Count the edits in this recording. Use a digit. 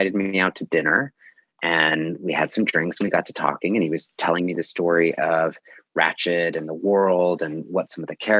0